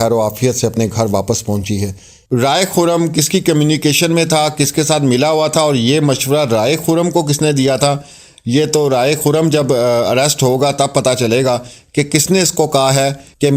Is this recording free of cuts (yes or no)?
no